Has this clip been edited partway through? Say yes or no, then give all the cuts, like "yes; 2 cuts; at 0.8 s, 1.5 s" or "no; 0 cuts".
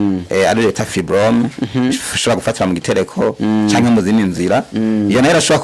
no; 0 cuts